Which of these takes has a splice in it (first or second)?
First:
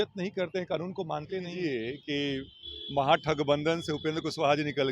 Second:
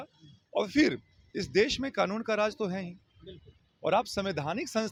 first